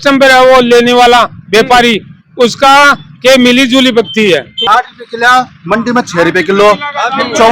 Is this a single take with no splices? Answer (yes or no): no